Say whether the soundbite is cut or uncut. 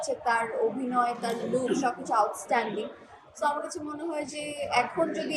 uncut